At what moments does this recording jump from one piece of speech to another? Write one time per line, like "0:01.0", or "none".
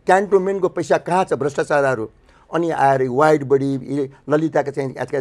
none

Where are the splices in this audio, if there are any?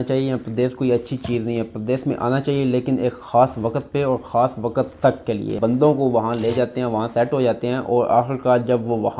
0:05.5

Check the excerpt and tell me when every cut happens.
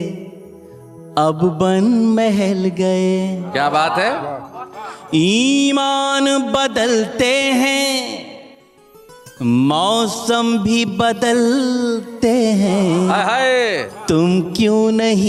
none

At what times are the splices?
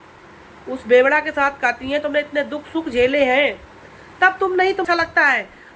0:04.8

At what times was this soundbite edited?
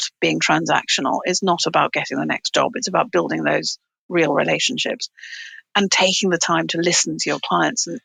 none

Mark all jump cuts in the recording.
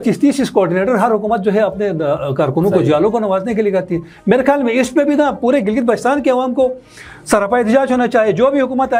none

